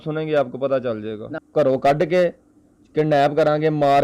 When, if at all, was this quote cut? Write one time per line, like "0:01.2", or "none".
0:01.3